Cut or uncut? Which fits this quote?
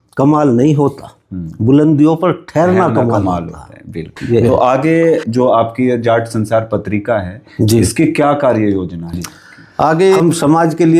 cut